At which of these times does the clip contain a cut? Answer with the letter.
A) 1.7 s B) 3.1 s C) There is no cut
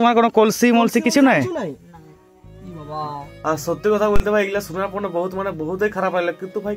C